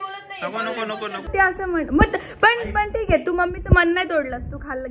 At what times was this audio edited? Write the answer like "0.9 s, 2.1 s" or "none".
1.3 s